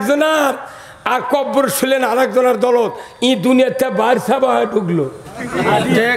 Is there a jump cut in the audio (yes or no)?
no